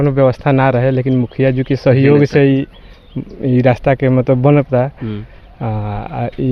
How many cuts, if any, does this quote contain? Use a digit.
0